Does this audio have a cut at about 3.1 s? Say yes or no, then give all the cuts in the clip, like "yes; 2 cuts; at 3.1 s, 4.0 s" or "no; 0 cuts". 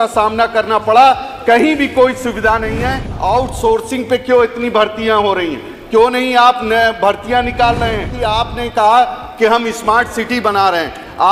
yes; 2 cuts; at 3.1 s, 8.1 s